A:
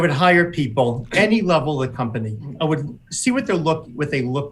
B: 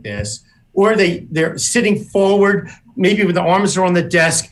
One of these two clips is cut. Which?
A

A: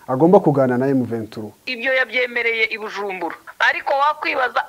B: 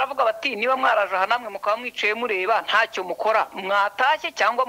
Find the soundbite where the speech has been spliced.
A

